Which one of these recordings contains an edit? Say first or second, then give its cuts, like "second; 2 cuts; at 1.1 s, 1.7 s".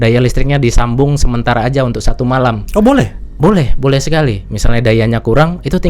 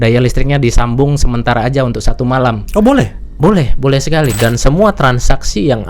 second; 1 cut; at 4.3 s